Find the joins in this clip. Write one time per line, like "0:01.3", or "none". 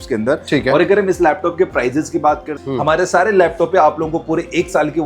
0:02.6